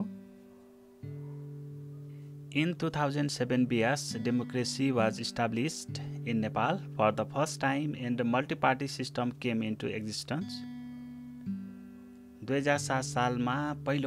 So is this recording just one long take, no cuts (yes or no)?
no